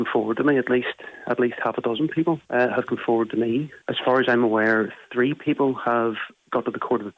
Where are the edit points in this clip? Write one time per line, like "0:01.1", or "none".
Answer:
0:02.4
0:03.8